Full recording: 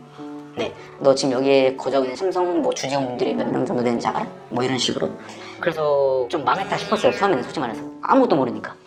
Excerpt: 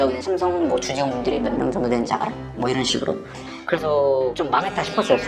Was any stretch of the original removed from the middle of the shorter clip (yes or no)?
no